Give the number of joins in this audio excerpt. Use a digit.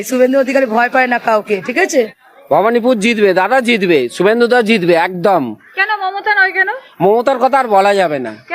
1